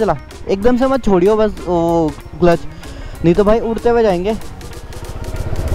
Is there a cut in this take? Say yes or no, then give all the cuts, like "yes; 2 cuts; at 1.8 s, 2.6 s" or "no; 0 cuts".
no; 0 cuts